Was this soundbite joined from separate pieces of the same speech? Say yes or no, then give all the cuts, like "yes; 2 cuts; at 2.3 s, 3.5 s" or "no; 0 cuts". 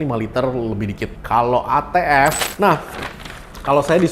yes; 1 cut; at 2.4 s